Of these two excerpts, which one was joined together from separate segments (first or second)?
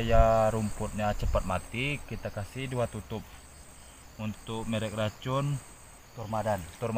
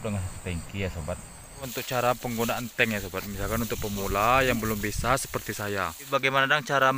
second